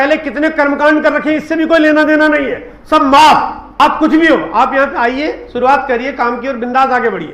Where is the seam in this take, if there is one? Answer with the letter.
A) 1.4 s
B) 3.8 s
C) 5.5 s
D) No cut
B